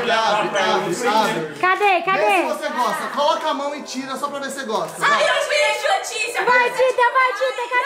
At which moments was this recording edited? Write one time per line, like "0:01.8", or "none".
none